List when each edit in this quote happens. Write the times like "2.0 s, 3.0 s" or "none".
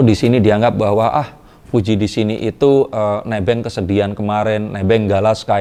none